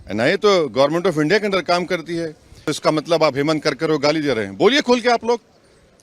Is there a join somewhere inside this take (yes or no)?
yes